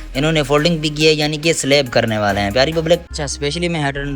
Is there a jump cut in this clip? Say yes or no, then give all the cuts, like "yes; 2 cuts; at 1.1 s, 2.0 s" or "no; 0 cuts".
yes; 1 cut; at 3.1 s